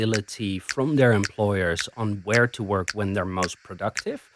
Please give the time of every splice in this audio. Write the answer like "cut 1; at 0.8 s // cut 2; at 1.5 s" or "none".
none